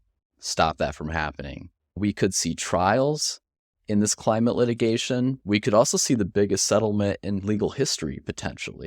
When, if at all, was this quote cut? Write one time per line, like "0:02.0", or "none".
0:02.0
0:05.4